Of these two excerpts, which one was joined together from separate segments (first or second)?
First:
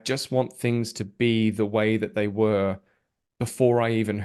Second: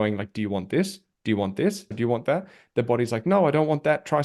second